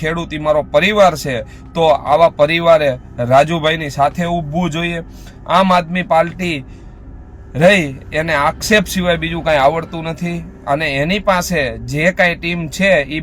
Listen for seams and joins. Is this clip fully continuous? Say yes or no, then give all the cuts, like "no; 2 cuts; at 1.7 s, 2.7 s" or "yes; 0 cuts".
yes; 0 cuts